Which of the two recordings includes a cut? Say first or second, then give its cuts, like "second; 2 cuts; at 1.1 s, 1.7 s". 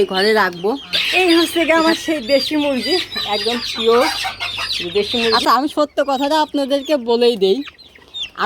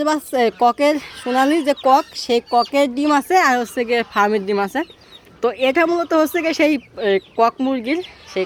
first; 2 cuts; at 0.9 s, 5.3 s